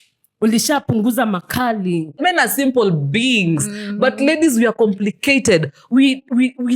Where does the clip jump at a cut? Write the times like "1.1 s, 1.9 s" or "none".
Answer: 2.2 s